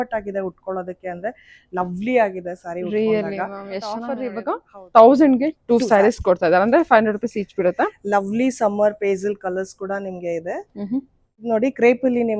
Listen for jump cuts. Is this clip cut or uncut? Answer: cut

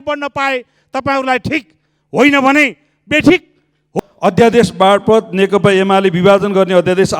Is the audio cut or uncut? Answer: cut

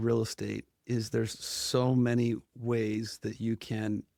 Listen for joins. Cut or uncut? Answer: uncut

